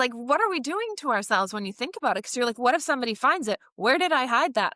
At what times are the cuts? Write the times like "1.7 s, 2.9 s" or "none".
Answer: none